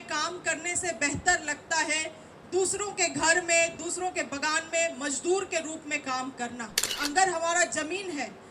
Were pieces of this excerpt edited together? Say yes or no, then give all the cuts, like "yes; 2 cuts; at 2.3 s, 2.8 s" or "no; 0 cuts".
yes; 1 cut; at 6.9 s